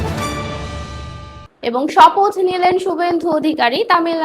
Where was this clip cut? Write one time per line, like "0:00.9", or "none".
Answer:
0:00.9